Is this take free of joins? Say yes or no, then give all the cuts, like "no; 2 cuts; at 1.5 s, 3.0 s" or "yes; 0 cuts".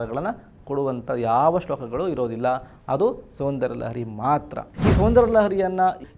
yes; 0 cuts